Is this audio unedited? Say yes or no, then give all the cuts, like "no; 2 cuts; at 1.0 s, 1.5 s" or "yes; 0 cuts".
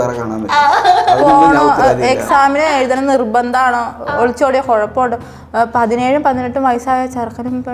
yes; 0 cuts